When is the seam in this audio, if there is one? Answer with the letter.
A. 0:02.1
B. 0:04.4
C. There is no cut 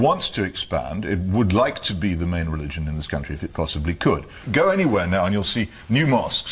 B